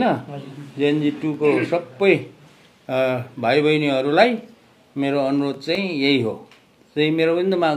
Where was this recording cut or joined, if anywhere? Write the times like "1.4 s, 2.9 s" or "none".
none